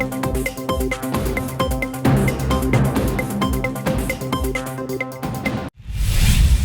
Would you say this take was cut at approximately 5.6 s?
yes; 1 cut; at 5.6 s

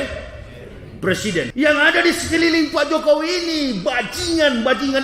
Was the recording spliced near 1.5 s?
yes; 1 cut; at 1.5 s

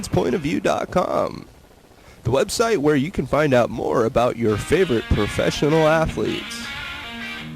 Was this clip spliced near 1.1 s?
no; 1 cut; at 6.4 s

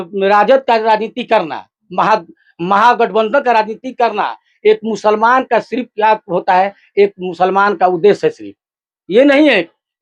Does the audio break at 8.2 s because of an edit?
no; 0 cuts

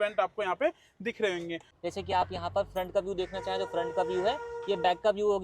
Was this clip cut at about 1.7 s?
yes; 1 cut; at 1.7 s

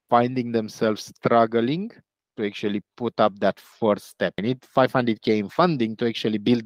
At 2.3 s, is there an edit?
no; 1 cut; at 4.4 s

